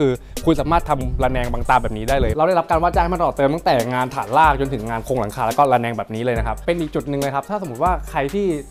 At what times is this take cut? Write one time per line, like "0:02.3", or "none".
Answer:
0:02.3
0:06.6

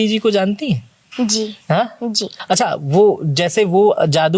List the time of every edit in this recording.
0:02.3

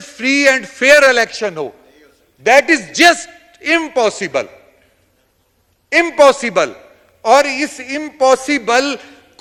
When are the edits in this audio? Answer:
none

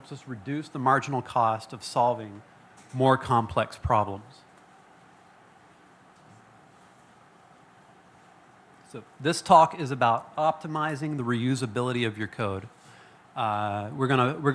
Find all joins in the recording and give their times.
0:11.9

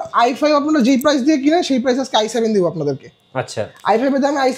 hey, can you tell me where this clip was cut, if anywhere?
none

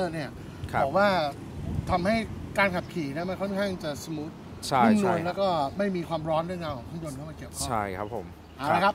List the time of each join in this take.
none

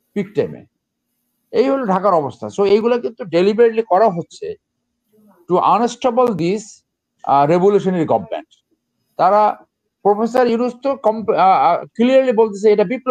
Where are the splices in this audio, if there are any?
none

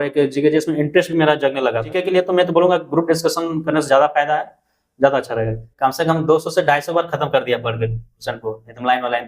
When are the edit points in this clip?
0:02.0
0:05.6

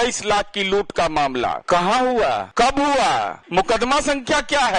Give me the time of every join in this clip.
0:01.6
0:02.5
0:03.4

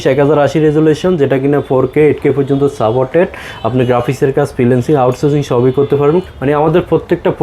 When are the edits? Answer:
0:06.2

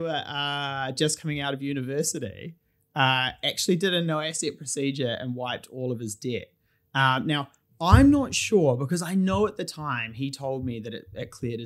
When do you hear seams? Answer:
none

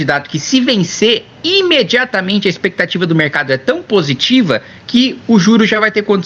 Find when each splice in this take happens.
none

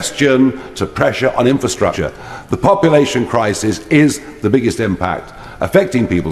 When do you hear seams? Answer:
0:02.0

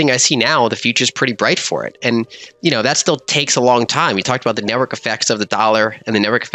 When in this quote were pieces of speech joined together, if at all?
none

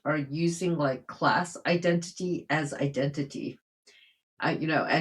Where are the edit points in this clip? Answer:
none

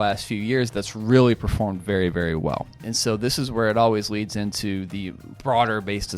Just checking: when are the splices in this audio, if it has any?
0:02.8
0:05.3

